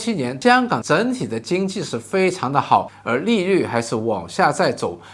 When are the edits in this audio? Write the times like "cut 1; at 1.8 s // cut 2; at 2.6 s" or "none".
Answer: none